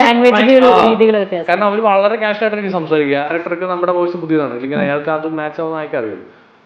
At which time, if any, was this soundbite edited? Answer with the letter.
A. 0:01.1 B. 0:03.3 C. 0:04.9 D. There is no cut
B